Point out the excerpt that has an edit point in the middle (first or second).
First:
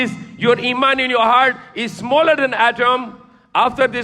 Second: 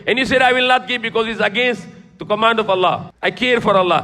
second